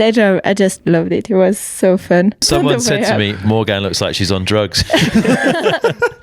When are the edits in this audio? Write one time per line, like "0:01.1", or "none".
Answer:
0:02.4